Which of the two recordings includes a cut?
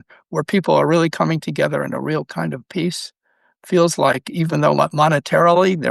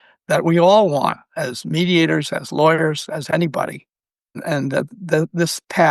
second; 1 cut; at 4.4 s

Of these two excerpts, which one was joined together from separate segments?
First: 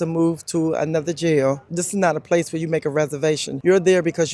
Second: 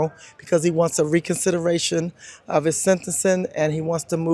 first; 2 cuts; at 1.7 s, 3.5 s

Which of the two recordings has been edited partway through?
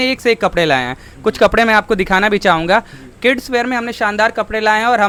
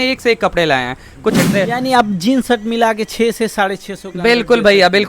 second; 1 cut; at 1.4 s

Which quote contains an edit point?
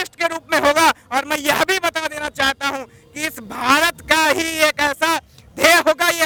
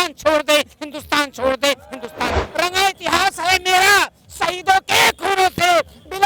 second; 1 cut; at 2.4 s

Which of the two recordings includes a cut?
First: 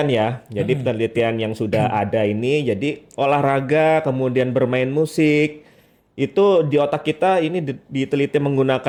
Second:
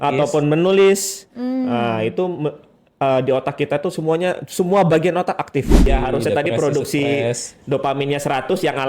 second; 1 cut; at 5.9 s

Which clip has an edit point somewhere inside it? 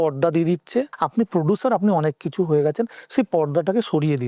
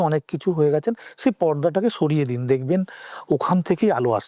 first; 1 cut; at 1.0 s

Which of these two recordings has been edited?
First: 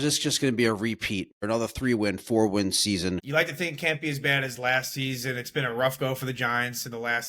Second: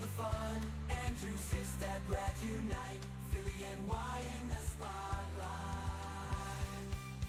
first; 2 cuts; at 1.4 s, 3.2 s

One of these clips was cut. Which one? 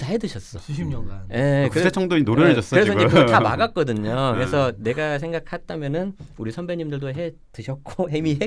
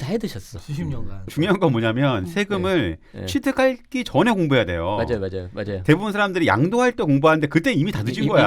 second; 1 cut; at 1.3 s

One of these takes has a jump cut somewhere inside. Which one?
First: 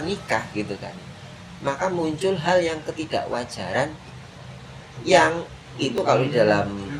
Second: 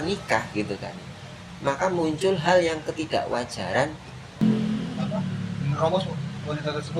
second; 1 cut; at 4.4 s

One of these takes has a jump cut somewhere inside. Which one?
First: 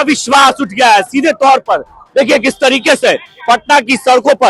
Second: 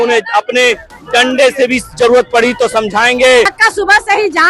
second; 1 cut; at 3.6 s

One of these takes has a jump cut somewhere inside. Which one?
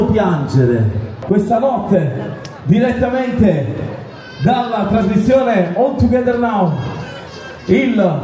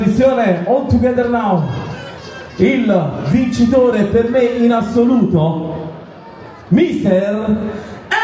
first; 1 cut; at 1.1 s

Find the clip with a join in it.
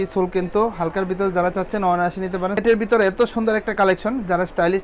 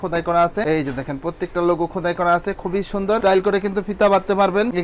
first; 1 cut; at 2.6 s

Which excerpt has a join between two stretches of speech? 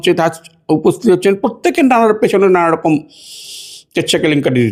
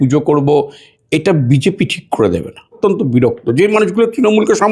second; 1 cut; at 2.8 s

